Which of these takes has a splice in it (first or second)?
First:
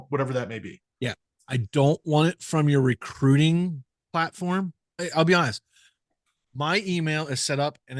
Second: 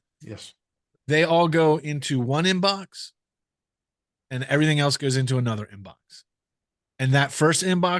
first